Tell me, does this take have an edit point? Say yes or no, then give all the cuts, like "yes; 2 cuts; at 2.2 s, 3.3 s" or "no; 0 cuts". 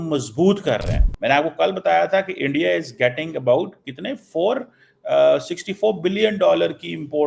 yes; 1 cut; at 1.0 s